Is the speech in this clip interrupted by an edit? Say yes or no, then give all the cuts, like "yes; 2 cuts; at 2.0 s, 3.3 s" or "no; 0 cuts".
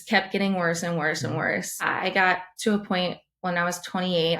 yes; 1 cut; at 1.9 s